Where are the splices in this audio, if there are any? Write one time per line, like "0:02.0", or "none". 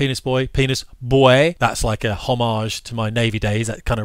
0:01.6